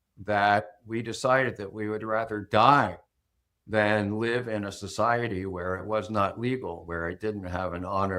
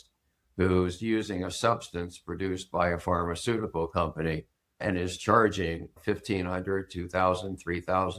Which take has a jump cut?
second; 2 cuts; at 4.8 s, 5.9 s

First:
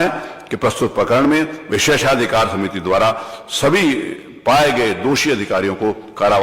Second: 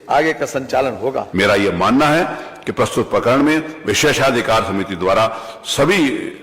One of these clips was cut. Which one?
second; 1 cut; at 1.2 s

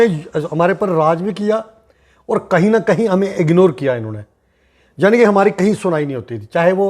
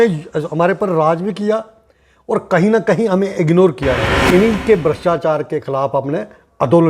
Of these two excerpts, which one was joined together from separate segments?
second; 1 cut; at 4.3 s

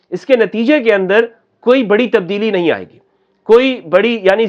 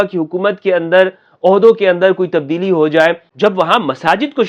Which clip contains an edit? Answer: second; 1 cut; at 3.3 s

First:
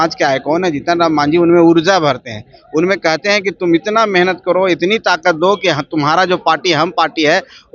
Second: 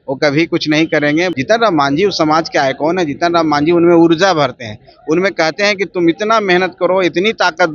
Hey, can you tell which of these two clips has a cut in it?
second; 1 cut; at 1.3 s

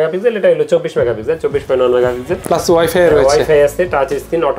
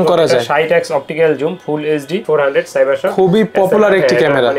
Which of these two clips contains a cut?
second; 1 cut; at 2.2 s

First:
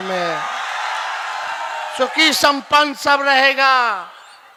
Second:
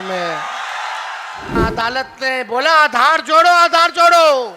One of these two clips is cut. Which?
second; 1 cut; at 1.6 s

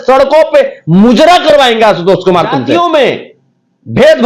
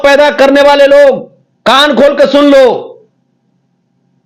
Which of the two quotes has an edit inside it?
first; 1 cut; at 2.7 s

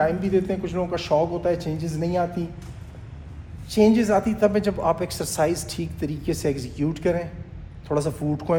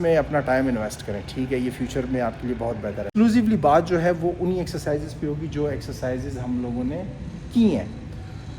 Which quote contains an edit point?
second; 1 cut; at 3.1 s

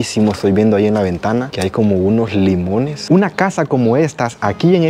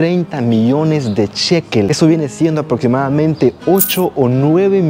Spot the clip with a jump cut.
first; 1 cut; at 3.0 s

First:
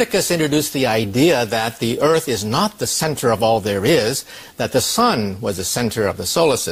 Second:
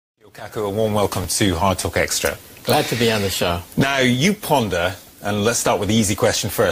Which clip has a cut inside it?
first; 1 cut; at 1.4 s

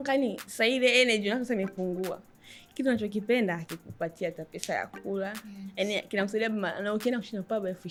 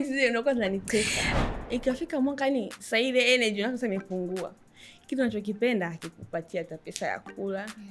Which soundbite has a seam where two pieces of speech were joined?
second; 1 cut; at 1.4 s

